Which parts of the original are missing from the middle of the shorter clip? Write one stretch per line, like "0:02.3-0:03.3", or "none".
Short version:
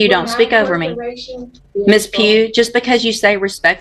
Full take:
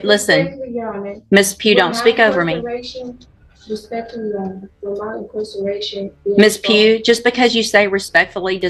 0:03.2-0:06.1